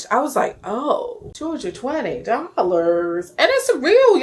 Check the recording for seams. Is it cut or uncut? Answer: uncut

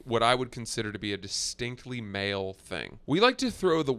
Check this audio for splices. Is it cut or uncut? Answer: cut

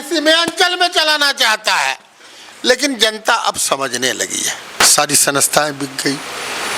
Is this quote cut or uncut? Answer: cut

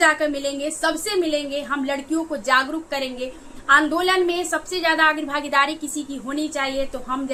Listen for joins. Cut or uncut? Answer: uncut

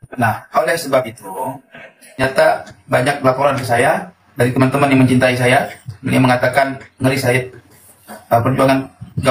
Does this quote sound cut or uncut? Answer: cut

